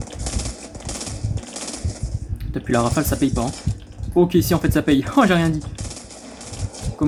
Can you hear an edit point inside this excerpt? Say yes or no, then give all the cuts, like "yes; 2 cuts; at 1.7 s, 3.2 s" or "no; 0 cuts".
no; 0 cuts